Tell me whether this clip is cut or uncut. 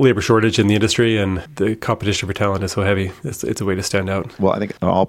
cut